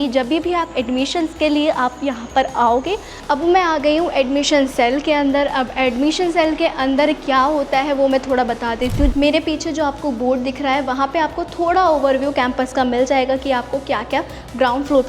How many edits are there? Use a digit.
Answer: 2